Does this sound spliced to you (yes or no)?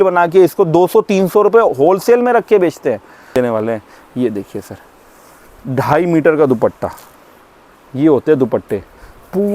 yes